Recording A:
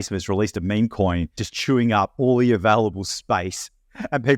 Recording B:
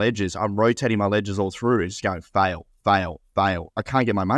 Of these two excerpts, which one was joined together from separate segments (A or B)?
A